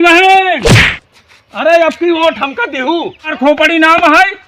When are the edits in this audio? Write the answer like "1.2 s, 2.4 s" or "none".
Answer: 3.3 s